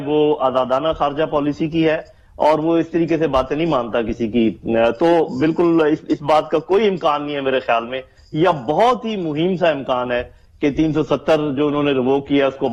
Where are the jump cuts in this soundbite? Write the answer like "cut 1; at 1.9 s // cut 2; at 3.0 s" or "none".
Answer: none